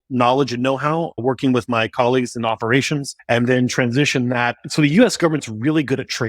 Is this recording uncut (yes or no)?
no